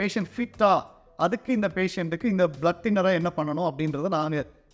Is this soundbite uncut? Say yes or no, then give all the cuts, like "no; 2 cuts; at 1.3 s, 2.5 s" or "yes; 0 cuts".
yes; 0 cuts